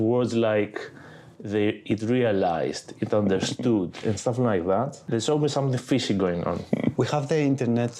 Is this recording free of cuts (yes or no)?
no